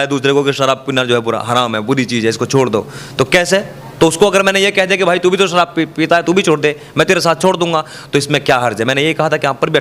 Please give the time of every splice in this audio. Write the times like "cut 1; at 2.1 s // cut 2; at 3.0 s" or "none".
none